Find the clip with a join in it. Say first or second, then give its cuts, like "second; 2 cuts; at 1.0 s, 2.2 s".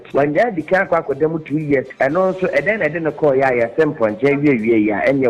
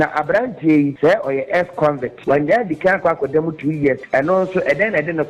second; 1 cut; at 0.9 s